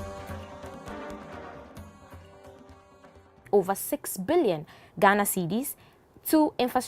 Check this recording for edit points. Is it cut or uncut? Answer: uncut